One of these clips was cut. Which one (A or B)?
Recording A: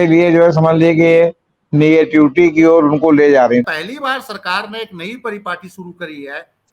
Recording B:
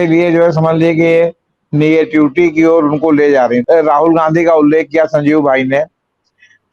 A